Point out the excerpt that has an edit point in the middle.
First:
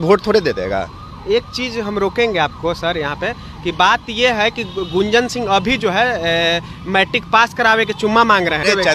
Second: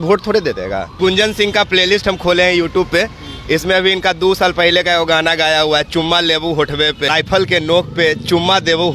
second; 2 cuts; at 1.0 s, 7.1 s

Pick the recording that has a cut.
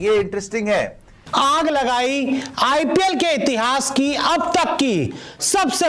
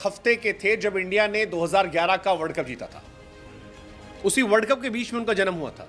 first; 1 cut; at 1.4 s

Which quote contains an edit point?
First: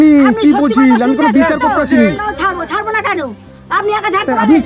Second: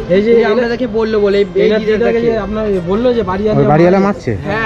first; 1 cut; at 2.1 s

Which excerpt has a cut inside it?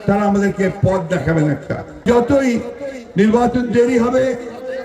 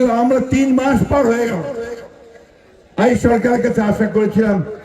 first; 1 cut; at 2.1 s

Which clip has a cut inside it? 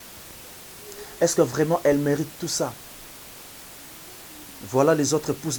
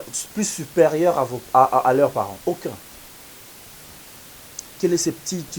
second; 1 cut; at 3.7 s

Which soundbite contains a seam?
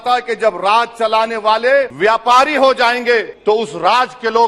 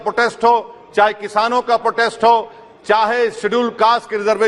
first; 2 cuts; at 1.9 s, 3.3 s

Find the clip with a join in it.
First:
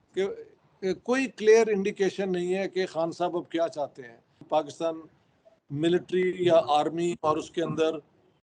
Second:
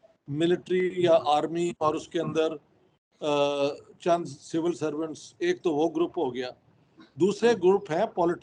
first; 1 cut; at 4.4 s

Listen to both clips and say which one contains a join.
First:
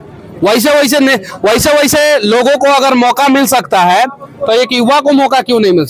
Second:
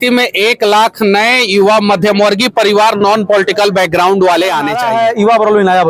second; 1 cut; at 4.8 s

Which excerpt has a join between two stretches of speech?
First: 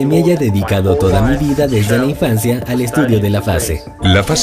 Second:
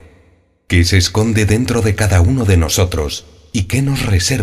first; 1 cut; at 1.2 s

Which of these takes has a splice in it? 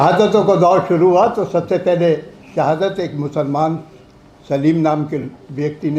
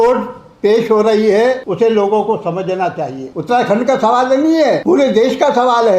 second; 3 cuts; at 1.6 s, 3.3 s, 4.8 s

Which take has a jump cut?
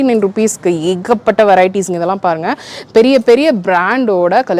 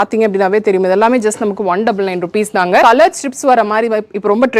second; 1 cut; at 2.8 s

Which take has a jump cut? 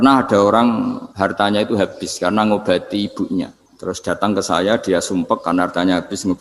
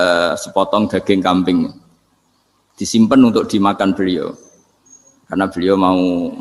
first; 2 cuts; at 1.0 s, 3.6 s

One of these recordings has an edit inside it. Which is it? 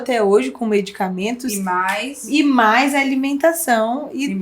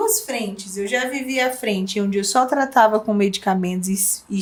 first; 1 cut; at 2.1 s

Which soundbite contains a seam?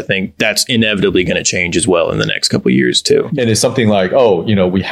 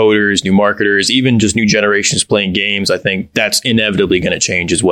first; 1 cut; at 3.3 s

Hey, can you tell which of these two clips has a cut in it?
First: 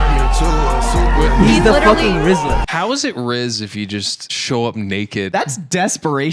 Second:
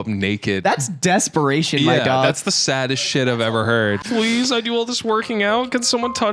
first; 1 cut; at 2.7 s

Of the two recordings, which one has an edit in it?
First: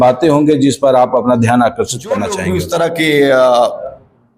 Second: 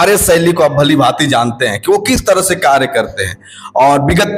first; 1 cut; at 2.5 s

